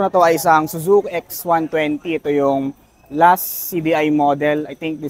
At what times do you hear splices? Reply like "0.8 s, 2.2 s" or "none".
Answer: none